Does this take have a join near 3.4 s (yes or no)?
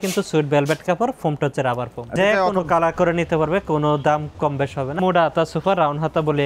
no